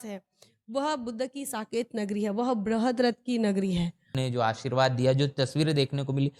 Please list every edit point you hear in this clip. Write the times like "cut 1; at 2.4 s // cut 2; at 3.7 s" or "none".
cut 1; at 4.1 s

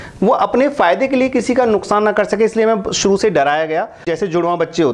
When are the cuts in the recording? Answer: cut 1; at 4.0 s

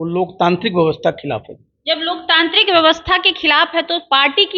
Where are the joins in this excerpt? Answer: none

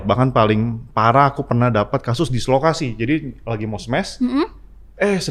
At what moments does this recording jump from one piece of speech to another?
none

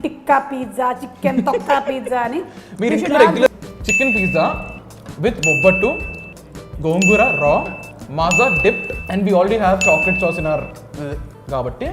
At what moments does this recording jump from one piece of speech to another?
cut 1; at 3.5 s

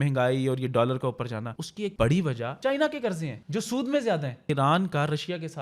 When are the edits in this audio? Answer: cut 1; at 1.8 s // cut 2; at 2.5 s // cut 3; at 3.4 s // cut 4; at 4.4 s

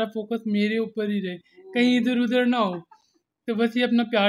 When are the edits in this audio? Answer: none

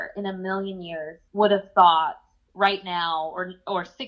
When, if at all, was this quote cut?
cut 1; at 1.2 s

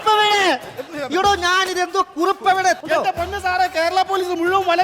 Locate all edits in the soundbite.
cut 1; at 2.8 s

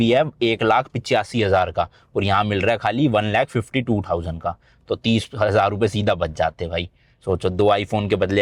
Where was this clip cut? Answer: none

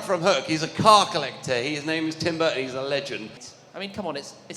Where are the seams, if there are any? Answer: cut 1; at 3.4 s

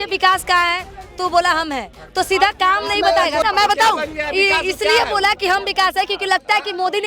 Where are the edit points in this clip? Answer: cut 1; at 3.4 s

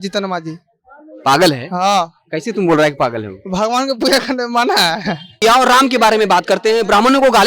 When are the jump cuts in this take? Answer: cut 1; at 5.4 s

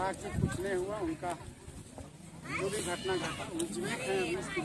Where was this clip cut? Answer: none

